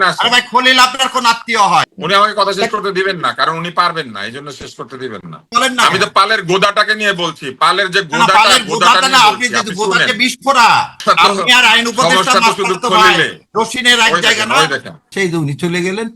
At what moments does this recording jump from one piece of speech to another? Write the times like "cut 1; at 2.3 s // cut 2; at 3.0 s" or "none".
cut 1; at 5.4 s // cut 2; at 11.0 s // cut 3; at 15.0 s